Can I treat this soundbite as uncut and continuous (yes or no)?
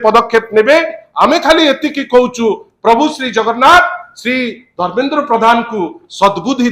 yes